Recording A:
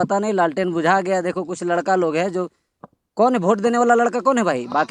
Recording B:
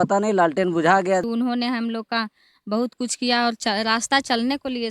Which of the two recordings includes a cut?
B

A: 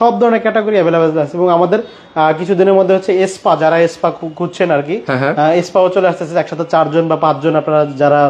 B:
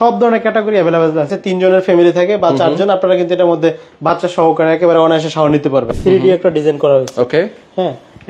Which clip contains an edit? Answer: B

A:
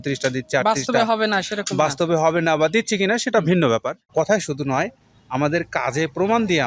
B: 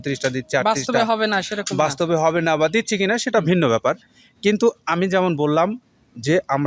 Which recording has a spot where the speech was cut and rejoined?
A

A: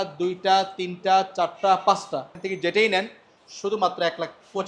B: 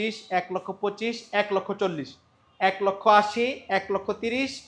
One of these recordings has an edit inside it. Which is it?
A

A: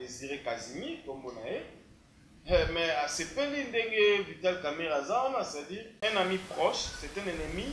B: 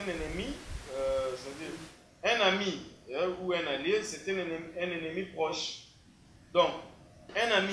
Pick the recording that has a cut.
A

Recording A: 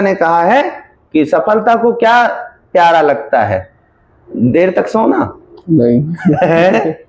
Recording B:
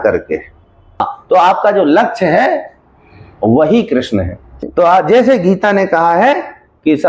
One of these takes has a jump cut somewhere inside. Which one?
B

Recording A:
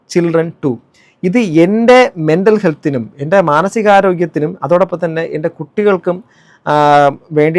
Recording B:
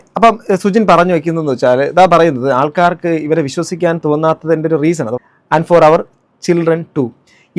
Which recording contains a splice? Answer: B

